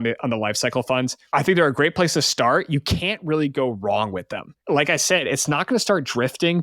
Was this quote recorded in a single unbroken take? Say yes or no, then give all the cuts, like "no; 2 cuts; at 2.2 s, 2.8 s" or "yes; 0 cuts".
no; 2 cuts; at 1.2 s, 4.5 s